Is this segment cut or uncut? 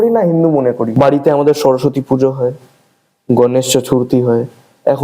cut